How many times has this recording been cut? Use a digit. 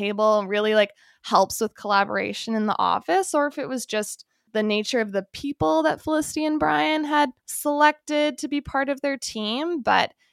1